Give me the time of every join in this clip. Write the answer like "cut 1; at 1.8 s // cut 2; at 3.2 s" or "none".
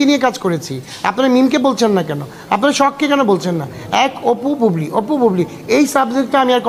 none